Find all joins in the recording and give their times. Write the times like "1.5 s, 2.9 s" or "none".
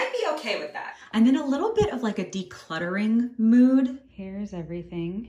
0.9 s, 4.0 s